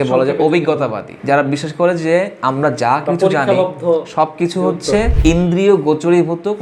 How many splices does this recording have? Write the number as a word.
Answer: two